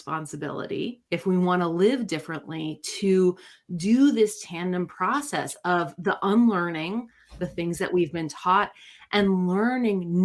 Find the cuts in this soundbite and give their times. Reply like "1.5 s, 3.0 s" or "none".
none